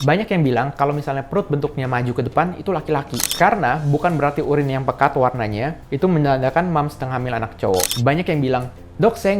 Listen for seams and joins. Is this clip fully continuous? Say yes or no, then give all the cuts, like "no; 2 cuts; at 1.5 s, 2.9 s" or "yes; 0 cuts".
no; 2 cuts; at 3.3 s, 7.9 s